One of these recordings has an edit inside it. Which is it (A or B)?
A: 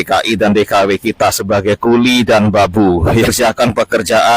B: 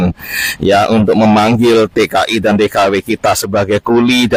A